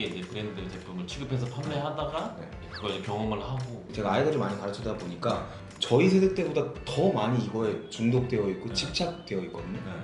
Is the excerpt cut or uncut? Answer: cut